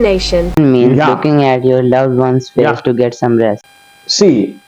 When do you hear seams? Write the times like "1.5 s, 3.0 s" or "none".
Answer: 3.6 s